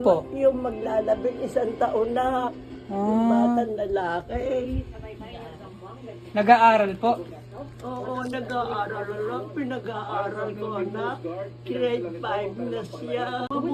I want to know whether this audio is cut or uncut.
uncut